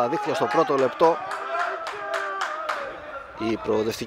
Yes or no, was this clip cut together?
no